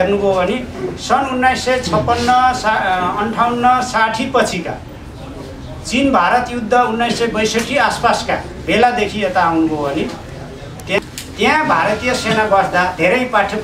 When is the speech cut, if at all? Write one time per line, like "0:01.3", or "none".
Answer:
0:11.1